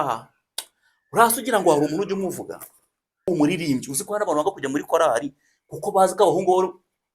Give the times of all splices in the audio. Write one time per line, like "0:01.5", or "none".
0:03.3